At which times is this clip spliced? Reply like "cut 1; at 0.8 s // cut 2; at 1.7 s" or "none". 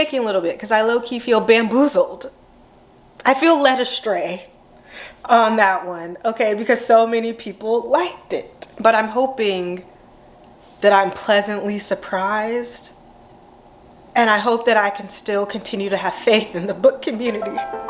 none